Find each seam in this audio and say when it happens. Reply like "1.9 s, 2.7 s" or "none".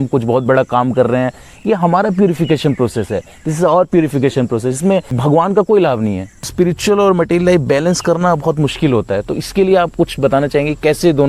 5.1 s, 6.5 s